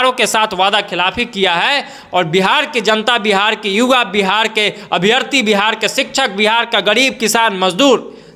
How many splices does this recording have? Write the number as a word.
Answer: zero